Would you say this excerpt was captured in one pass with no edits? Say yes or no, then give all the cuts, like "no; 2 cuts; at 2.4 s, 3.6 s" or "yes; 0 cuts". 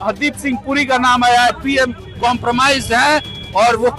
no; 1 cut; at 1.5 s